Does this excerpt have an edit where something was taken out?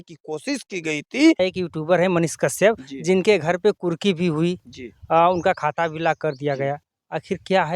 yes; 1 cut; at 1.4 s

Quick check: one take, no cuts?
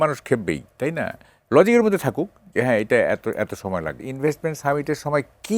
no; 1 cut; at 4.1 s

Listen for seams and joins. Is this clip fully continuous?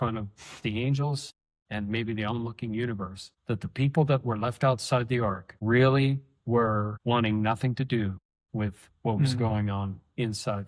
yes; 0 cuts

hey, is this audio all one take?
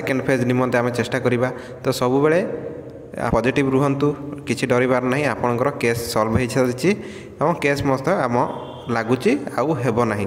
no; 1 cut; at 3.3 s

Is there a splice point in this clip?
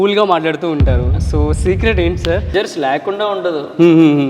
yes; 1 cut; at 2.5 s

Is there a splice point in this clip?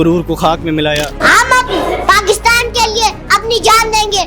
yes; 1 cut; at 1.2 s

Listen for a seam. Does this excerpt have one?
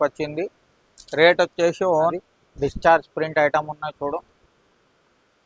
yes; 1 cut; at 2.1 s

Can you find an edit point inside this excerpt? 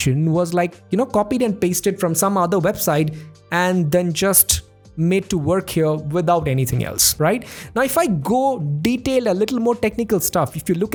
no; 0 cuts

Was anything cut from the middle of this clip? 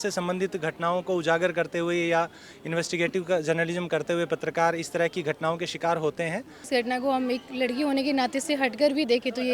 yes; 1 cut; at 6.6 s

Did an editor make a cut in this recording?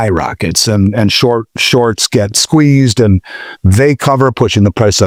no; 0 cuts

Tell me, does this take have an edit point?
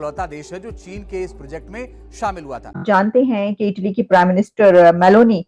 yes; 1 cut; at 2.8 s

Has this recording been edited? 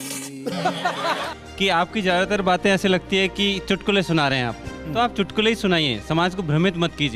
yes; 1 cut; at 1.4 s

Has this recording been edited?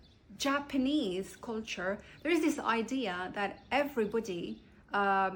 no; 0 cuts

